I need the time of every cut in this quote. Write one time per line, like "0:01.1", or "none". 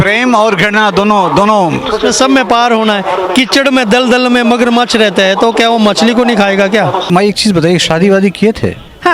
0:07.1